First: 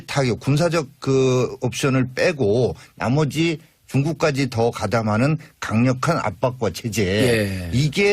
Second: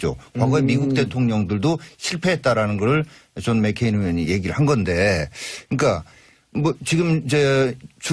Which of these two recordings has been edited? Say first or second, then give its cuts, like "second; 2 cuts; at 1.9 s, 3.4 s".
first; 1 cut; at 5.6 s